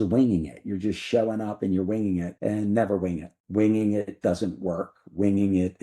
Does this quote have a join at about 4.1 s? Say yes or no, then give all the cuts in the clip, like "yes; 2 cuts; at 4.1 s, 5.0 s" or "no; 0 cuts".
no; 1 cut; at 2.3 s